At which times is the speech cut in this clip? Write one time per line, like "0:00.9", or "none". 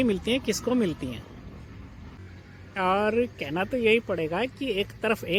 none